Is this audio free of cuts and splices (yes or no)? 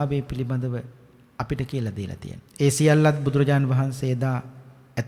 no